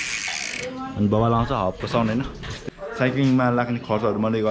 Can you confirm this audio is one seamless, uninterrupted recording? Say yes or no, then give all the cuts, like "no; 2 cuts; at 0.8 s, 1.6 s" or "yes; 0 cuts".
no; 1 cut; at 2.6 s